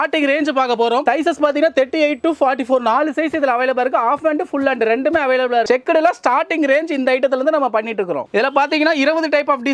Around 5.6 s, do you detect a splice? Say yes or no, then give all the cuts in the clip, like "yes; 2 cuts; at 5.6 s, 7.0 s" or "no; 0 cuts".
yes; 3 cuts; at 1.0 s, 5.6 s, 8.3 s